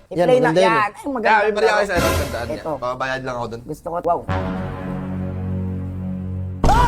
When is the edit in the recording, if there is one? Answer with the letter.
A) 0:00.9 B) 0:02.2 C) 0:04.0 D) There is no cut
C